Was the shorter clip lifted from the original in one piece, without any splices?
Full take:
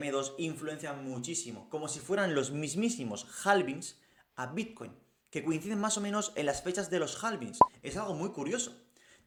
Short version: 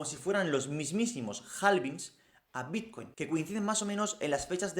no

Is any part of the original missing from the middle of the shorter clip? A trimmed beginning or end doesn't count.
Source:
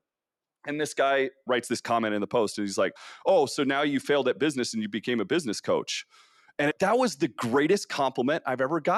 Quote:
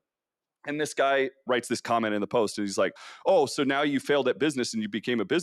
no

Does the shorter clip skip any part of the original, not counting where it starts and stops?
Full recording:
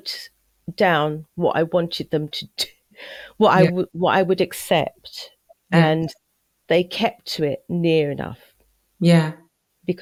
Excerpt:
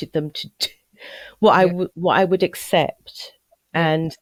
no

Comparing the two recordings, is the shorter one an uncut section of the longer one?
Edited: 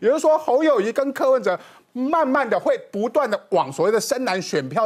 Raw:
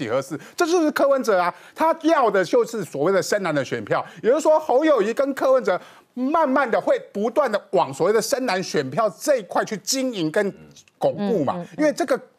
yes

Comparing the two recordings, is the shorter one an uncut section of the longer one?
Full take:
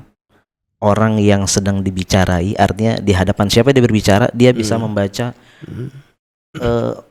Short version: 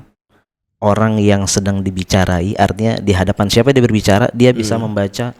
yes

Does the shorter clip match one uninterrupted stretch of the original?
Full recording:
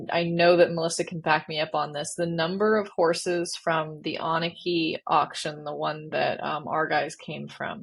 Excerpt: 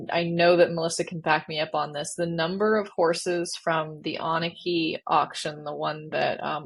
yes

